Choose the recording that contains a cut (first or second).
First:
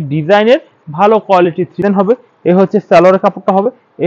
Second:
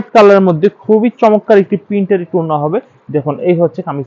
first